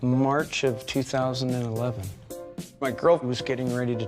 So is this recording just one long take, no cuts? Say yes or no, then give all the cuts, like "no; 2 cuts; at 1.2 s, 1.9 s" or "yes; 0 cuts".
no; 1 cut; at 2.1 s